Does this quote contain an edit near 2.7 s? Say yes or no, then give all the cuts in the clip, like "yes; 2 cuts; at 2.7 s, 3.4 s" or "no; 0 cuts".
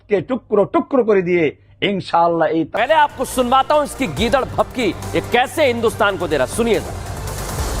yes; 1 cut; at 2.7 s